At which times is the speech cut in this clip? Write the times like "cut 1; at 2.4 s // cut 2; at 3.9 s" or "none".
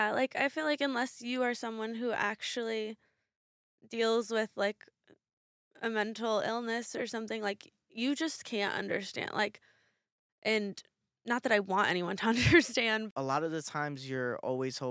cut 1; at 13.1 s